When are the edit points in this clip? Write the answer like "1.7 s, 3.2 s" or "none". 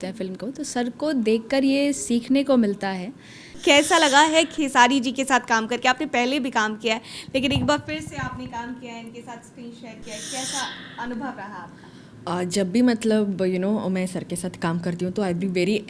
3.5 s